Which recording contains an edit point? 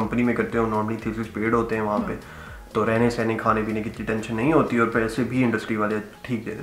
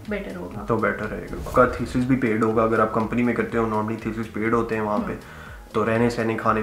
second; 1 cut; at 1.5 s

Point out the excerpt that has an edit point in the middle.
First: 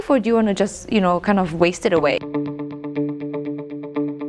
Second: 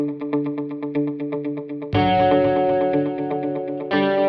first; 1 cut; at 2.2 s

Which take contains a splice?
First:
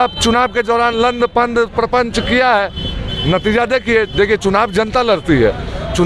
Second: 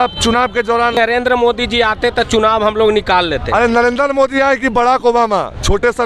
second; 1 cut; at 0.9 s

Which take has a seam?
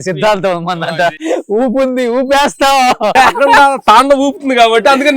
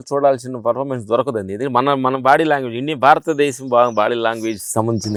first; 2 cuts; at 1.1 s, 3.1 s

